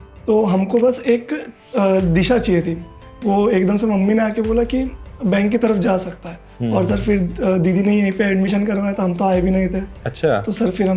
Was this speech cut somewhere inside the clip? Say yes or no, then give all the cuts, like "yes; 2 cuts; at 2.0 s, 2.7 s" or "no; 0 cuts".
no; 0 cuts